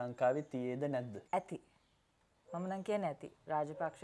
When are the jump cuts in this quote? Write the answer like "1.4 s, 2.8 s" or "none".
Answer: 1.2 s